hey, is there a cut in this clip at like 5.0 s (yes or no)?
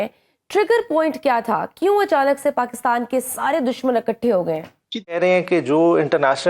yes